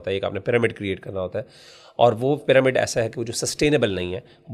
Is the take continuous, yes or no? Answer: yes